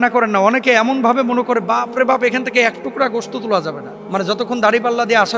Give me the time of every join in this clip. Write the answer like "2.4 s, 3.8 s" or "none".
3.9 s